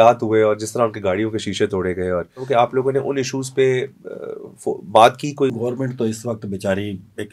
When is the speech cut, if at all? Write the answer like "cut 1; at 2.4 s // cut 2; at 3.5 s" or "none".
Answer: cut 1; at 2.4 s // cut 2; at 5.5 s